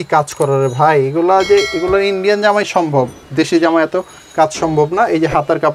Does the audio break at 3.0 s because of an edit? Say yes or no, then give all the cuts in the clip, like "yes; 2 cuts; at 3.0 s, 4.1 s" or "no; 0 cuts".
no; 0 cuts